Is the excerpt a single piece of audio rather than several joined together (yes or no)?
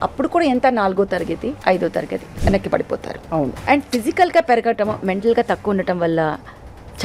no